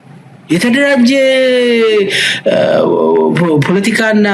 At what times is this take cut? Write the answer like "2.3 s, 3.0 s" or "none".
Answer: none